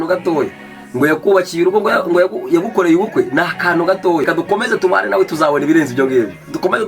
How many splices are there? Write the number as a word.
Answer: one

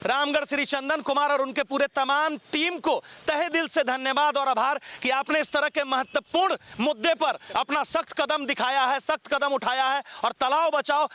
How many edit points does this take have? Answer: zero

